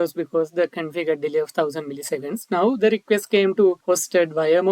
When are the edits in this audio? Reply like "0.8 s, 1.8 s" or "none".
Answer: 3.8 s